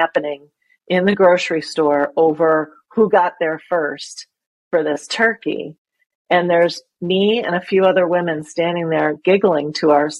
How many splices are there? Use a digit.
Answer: 0